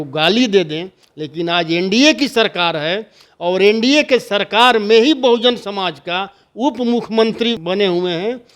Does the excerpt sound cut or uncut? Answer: cut